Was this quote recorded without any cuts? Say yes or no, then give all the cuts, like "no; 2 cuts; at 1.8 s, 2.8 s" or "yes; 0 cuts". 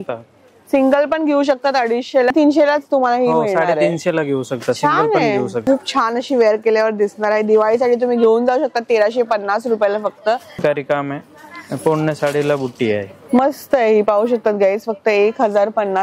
no; 3 cuts; at 2.3 s, 5.6 s, 10.6 s